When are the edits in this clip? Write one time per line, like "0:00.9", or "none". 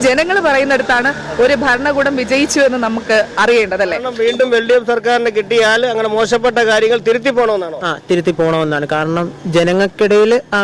0:04.1